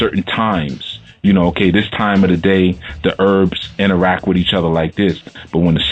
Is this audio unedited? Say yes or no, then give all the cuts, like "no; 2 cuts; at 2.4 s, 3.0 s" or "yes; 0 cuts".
no; 1 cut; at 3.3 s